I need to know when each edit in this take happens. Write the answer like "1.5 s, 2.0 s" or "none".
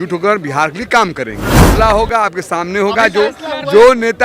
1.7 s